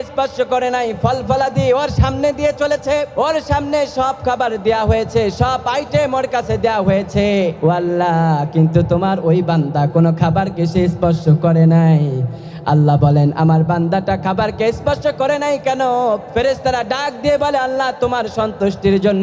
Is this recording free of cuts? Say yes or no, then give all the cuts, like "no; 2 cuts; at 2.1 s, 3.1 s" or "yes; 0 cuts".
yes; 0 cuts